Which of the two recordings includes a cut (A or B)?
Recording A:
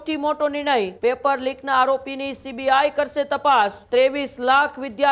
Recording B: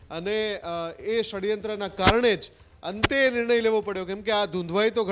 A